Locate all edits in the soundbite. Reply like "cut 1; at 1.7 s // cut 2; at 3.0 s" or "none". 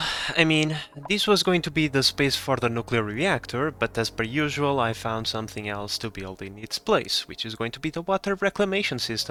none